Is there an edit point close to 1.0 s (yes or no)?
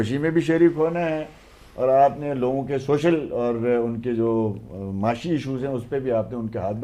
no